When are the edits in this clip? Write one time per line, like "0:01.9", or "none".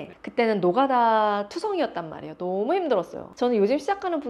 0:03.3